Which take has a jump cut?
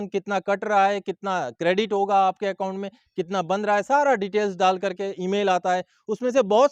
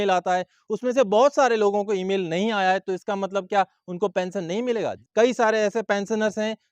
second; 1 cut; at 5.0 s

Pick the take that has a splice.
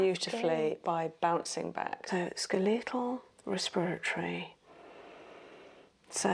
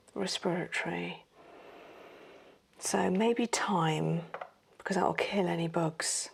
first; 1 cut; at 2.0 s

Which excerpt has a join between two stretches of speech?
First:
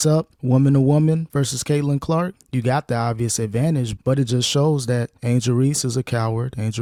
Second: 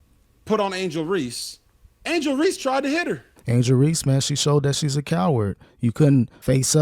second; 1 cut; at 3.3 s

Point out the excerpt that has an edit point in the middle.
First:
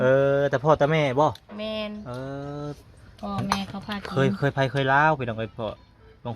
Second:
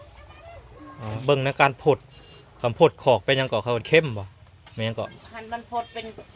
second; 1 cut; at 1.2 s

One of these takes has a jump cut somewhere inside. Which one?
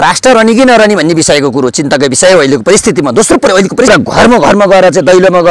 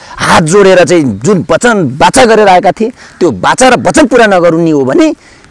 first; 1 cut; at 3.9 s

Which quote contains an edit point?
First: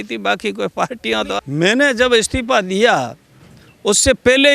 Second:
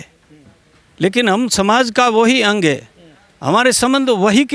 first; 1 cut; at 1.4 s

